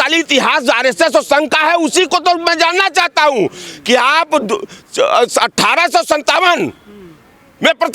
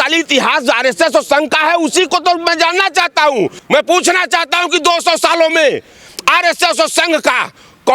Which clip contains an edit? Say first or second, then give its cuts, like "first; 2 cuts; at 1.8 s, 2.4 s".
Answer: second; 1 cut; at 3.6 s